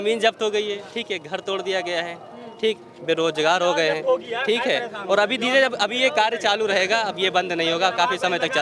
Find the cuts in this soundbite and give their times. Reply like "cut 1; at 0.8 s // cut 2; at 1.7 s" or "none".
none